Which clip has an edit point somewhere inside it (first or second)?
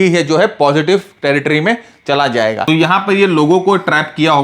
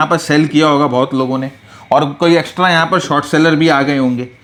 first